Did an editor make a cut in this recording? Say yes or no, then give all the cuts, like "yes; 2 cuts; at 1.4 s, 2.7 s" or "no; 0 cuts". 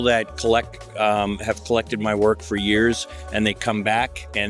no; 0 cuts